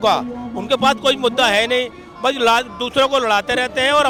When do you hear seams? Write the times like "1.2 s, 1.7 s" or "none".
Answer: none